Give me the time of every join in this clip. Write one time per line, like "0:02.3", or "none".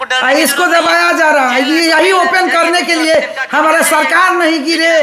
none